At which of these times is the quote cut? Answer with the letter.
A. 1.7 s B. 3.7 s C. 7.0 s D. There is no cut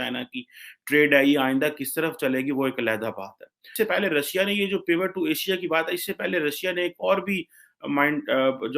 B